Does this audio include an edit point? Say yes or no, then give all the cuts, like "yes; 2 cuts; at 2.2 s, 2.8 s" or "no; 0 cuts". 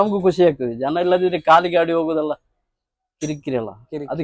no; 0 cuts